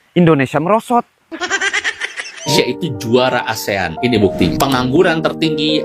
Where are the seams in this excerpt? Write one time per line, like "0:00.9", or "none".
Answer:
0:02.5